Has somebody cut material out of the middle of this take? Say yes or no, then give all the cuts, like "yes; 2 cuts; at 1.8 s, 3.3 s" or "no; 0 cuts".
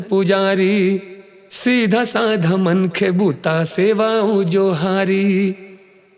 no; 0 cuts